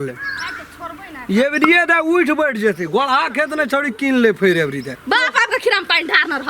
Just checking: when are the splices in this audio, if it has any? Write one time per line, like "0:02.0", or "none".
0:04.9